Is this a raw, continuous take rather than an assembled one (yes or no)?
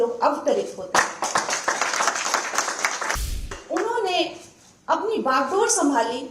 no